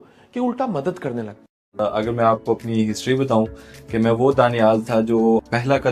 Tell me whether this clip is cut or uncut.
cut